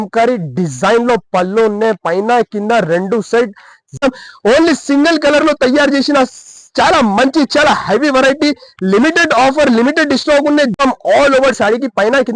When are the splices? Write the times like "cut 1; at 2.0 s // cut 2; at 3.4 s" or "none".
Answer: cut 1; at 4.0 s // cut 2; at 10.7 s